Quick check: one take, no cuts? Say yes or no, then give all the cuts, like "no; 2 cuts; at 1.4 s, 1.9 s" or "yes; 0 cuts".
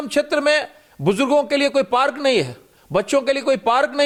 yes; 0 cuts